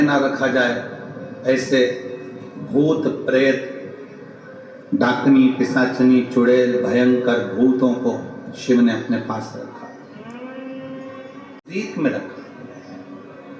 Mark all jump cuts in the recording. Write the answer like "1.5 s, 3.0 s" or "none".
11.7 s